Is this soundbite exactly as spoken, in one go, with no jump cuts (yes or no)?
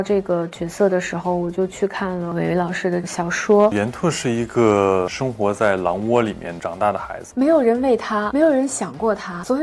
no